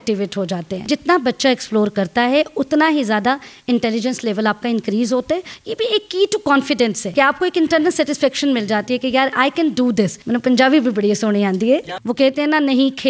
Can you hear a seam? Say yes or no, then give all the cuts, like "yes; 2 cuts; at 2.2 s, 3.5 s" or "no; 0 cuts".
yes; 5 cuts; at 0.8 s, 5.5 s, 7.0 s, 10.2 s, 12.0 s